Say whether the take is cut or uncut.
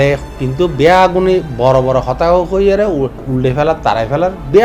cut